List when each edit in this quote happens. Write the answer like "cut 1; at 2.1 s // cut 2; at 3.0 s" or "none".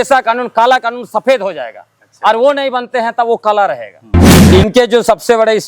cut 1; at 4.2 s

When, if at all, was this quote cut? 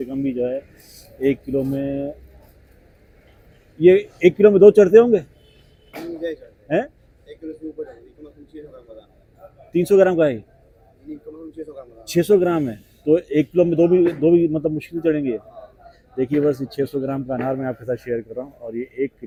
none

